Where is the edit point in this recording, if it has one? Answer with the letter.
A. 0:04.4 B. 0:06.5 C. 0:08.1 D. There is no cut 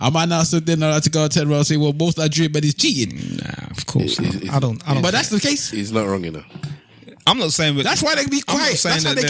D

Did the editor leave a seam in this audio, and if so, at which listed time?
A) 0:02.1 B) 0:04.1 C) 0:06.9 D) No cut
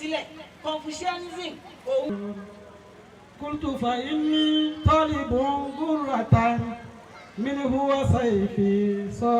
A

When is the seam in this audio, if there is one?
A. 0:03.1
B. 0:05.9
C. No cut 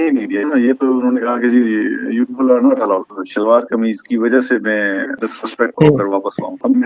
A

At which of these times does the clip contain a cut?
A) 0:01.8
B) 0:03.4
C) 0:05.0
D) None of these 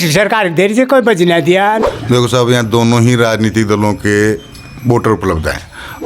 A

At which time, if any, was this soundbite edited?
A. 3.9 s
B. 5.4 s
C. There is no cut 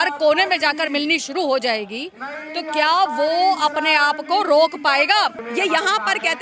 B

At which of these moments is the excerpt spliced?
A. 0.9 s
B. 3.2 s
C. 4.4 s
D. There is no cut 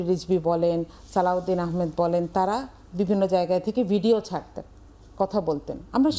D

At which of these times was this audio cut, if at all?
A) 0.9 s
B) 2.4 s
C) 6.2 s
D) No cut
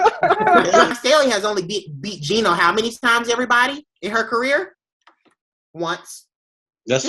A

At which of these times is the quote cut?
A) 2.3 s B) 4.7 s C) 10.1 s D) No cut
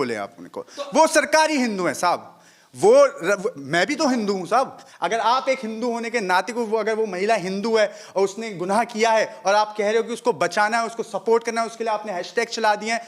B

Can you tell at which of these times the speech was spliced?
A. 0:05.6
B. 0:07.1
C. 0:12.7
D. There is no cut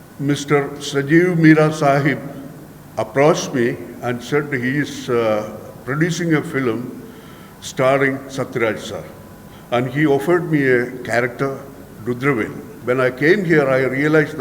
C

